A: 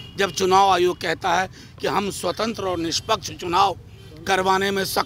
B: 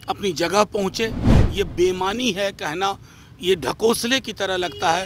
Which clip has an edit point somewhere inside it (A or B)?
B